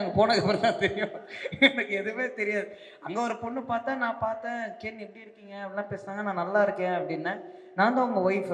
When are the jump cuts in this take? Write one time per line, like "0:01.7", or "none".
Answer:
none